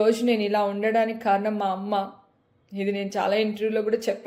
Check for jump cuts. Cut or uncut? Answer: uncut